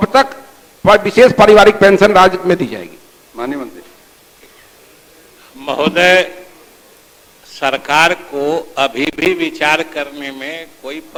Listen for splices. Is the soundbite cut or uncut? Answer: uncut